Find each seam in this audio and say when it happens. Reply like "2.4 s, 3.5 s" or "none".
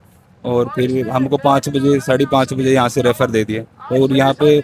none